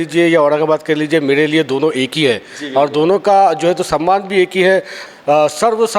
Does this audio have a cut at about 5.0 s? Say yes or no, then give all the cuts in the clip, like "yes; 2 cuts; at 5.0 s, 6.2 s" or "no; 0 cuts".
yes; 1 cut; at 5.0 s